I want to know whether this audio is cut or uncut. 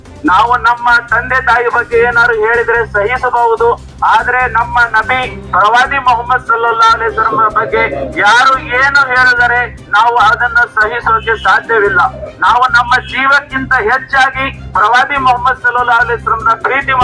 uncut